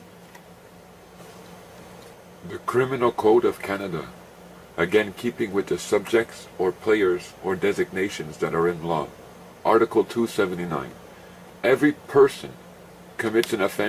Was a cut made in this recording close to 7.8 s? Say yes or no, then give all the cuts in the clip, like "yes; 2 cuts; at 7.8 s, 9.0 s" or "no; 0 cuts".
no; 1 cut; at 3.2 s